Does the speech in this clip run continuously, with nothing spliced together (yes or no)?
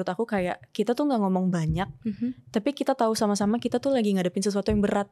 yes